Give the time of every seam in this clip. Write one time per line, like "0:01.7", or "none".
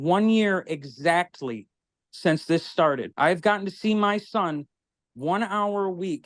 0:03.1